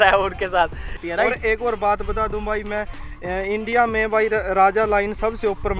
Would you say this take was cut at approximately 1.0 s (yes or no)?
yes